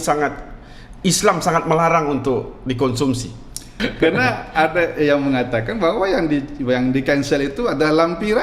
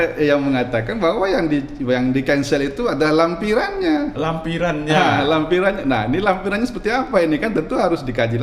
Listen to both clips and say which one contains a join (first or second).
first